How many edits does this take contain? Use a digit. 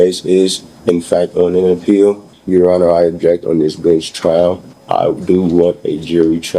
2